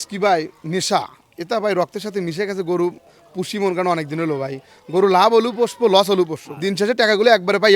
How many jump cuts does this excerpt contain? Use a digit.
1